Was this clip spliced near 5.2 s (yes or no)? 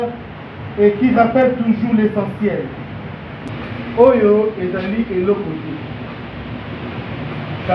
no